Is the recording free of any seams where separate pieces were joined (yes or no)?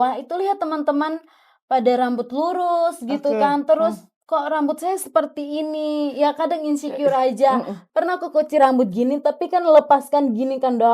no